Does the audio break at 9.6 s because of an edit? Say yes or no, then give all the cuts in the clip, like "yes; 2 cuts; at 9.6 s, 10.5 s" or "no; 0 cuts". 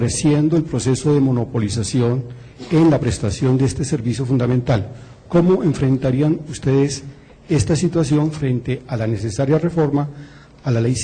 yes; 1 cut; at 9.6 s